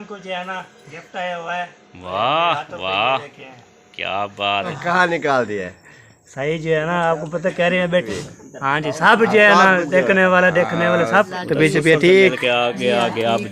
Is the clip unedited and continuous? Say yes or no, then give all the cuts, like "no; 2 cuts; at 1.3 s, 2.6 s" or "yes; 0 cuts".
no; 3 cuts; at 4.8 s, 8.1 s, 11.3 s